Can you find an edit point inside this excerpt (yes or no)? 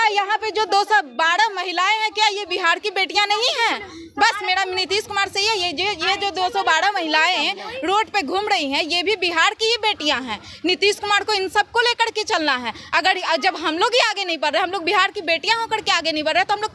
no